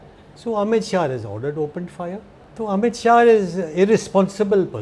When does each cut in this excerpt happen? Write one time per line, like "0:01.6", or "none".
0:02.4